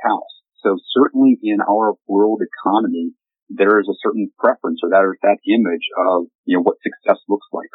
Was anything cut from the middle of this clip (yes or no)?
yes